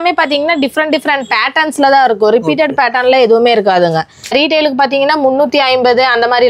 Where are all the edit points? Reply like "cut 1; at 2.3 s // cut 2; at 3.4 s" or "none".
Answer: cut 1; at 4.3 s